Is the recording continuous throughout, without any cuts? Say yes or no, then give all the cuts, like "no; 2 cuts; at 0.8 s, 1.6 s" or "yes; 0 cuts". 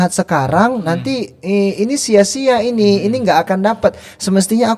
yes; 0 cuts